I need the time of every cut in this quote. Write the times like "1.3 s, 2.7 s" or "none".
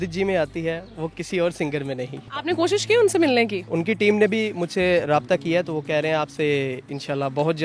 2.3 s, 3.6 s